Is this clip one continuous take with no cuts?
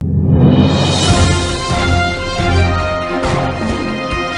yes; 0 cuts

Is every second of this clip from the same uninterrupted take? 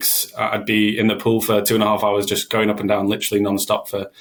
yes; 0 cuts

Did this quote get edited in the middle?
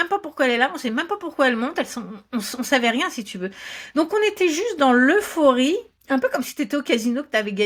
no; 0 cuts

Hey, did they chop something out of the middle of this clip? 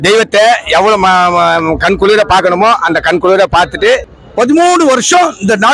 yes; 1 cut; at 4.2 s

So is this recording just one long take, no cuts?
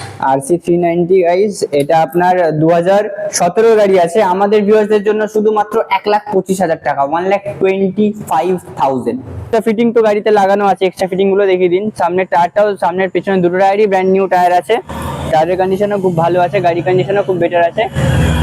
no; 1 cut; at 9.5 s

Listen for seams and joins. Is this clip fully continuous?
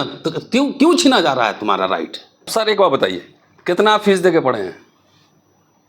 no; 1 cut; at 2.5 s

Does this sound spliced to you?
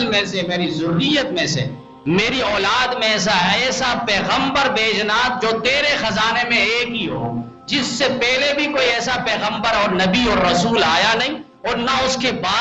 no; 0 cuts

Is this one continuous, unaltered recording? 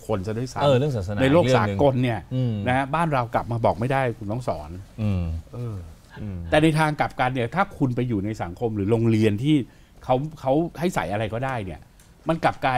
no; 1 cut; at 6.0 s

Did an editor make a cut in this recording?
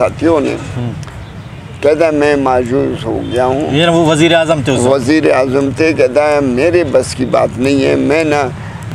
no; 0 cuts

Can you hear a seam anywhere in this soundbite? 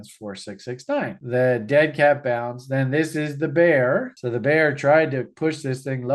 yes; 2 cuts; at 1.2 s, 4.2 s

